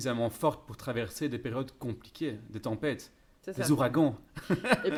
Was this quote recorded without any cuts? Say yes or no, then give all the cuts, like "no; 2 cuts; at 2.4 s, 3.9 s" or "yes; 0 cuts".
yes; 0 cuts